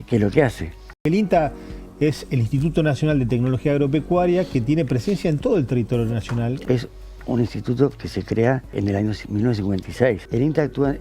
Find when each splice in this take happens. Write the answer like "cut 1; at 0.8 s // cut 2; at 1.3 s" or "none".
cut 1; at 1.0 s // cut 2; at 6.6 s // cut 3; at 8.7 s // cut 4; at 10.2 s